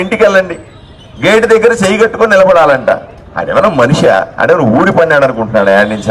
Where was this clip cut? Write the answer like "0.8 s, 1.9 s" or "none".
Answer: none